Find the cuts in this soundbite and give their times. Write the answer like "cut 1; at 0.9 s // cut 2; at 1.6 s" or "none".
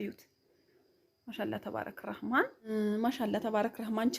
cut 1; at 2.7 s

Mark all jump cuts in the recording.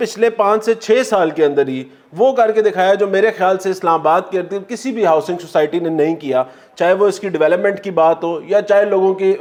none

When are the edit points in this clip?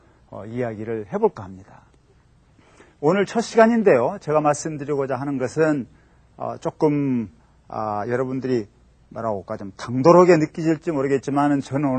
cut 1; at 5.5 s

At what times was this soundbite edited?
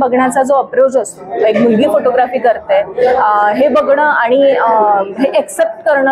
none

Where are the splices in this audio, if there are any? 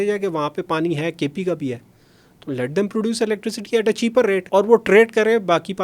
cut 1; at 4.4 s

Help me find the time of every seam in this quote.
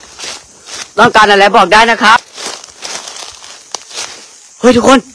cut 1; at 2.4 s

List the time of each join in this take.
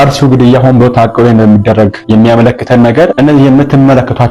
none

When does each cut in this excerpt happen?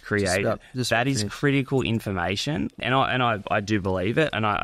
cut 1; at 2.8 s

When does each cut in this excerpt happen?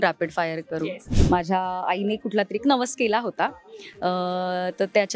cut 1; at 1.1 s

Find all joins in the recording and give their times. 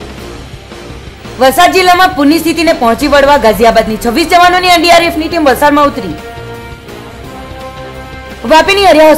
cut 1; at 1.2 s

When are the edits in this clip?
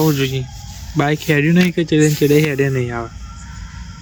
none

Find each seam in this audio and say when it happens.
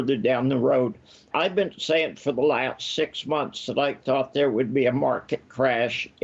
cut 1; at 1.3 s

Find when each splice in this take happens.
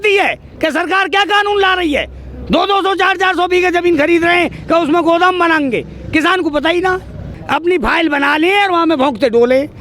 cut 1; at 7.4 s

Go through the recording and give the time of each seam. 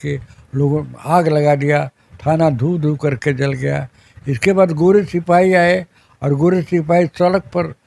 none

